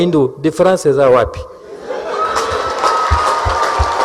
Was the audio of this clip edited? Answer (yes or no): no